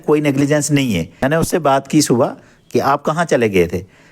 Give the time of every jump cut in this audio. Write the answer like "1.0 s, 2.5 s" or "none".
1.1 s